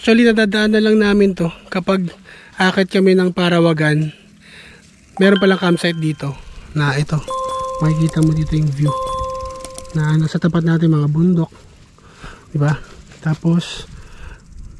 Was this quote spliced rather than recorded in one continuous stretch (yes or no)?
no